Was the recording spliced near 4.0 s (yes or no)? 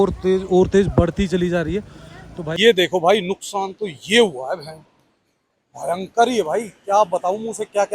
no